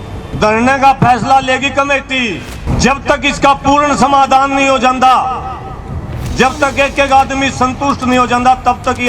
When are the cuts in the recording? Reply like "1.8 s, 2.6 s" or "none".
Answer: 2.6 s